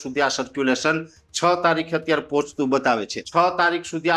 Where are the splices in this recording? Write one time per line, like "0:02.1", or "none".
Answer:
0:03.1

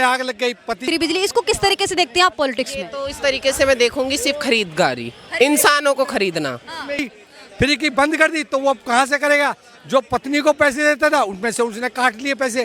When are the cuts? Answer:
0:00.9
0:07.2

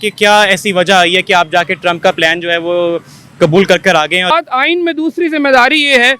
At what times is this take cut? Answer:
0:04.3

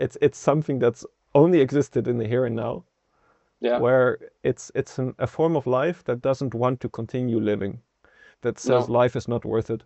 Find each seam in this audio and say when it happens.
none

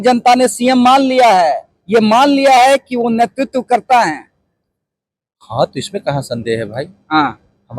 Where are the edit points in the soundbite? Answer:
none

